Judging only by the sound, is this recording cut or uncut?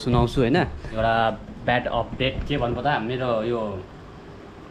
cut